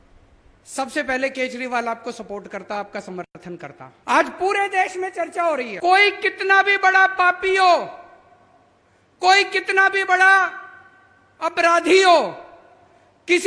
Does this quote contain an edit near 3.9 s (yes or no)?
yes